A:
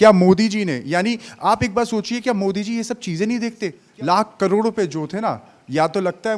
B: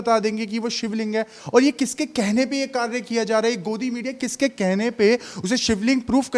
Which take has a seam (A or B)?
A